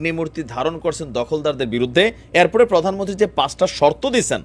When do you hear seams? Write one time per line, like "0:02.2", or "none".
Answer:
0:02.2